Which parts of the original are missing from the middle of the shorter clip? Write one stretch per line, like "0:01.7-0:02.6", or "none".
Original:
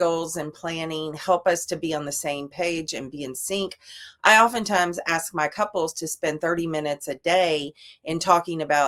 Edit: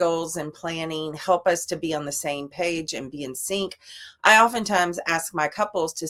none